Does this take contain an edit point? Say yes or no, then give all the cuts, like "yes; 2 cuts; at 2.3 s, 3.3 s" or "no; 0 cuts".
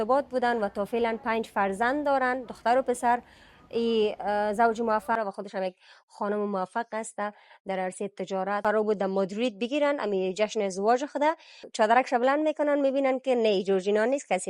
yes; 3 cuts; at 5.2 s, 8.6 s, 11.6 s